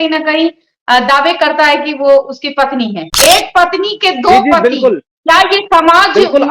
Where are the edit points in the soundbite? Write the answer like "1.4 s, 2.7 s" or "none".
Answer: 3.1 s